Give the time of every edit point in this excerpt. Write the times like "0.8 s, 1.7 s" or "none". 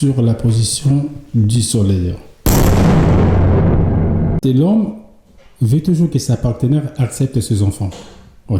2.4 s, 4.4 s